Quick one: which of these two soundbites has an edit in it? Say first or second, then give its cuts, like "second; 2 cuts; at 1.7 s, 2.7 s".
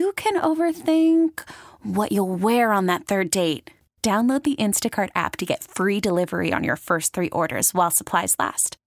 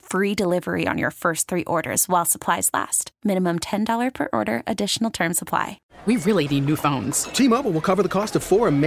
second; 1 cut; at 5.9 s